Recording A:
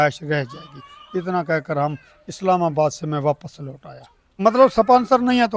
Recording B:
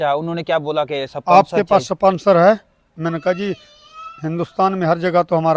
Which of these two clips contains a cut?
A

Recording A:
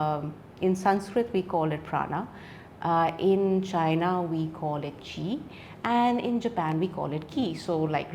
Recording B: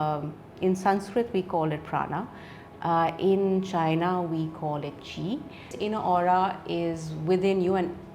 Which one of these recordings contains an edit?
B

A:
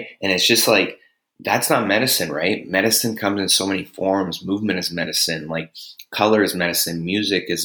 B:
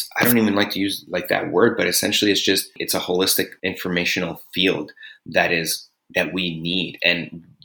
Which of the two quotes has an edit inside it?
B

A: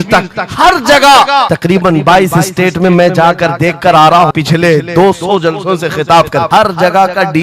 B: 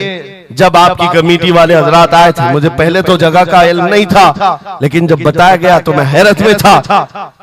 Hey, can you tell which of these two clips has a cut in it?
A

